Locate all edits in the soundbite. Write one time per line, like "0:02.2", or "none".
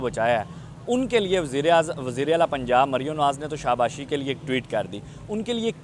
none